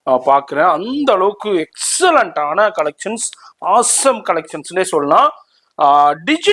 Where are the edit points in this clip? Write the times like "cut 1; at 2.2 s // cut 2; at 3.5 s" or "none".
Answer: none